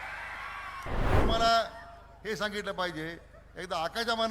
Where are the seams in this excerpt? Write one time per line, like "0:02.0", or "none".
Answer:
0:01.2